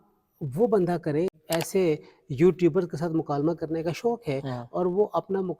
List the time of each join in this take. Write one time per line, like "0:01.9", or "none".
0:01.3